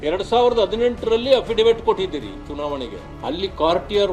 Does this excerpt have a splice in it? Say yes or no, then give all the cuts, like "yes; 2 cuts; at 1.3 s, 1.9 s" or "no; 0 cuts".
no; 0 cuts